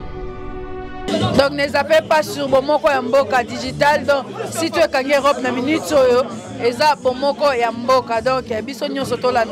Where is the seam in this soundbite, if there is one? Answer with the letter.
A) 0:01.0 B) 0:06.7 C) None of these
A